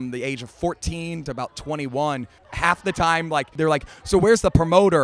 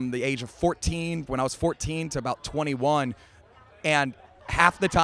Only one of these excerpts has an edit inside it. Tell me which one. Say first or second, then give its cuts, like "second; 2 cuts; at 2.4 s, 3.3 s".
first; 3 cuts; at 1.2 s, 2.4 s, 3.6 s